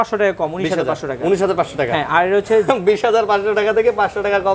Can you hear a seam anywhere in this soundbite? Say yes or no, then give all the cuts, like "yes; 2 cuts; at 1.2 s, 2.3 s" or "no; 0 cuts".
no; 0 cuts